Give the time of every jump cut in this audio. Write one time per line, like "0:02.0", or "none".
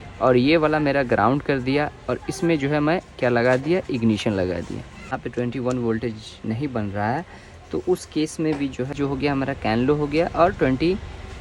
0:05.1
0:08.9